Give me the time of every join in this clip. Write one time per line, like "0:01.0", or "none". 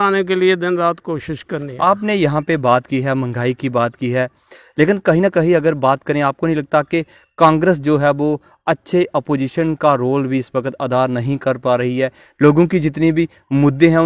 none